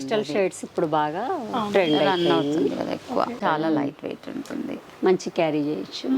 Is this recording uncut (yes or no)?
no